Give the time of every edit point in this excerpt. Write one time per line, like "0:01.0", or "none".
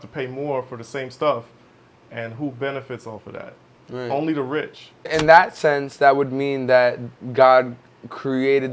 0:05.1